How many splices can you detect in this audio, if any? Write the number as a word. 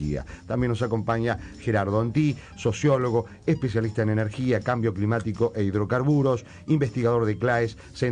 one